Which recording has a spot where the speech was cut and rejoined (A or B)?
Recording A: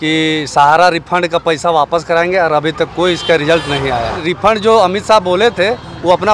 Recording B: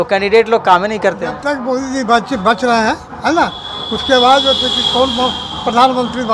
A